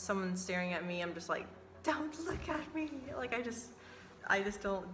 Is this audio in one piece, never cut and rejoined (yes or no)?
no